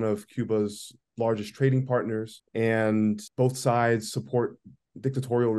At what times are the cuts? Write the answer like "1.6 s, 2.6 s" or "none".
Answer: 2.4 s, 3.3 s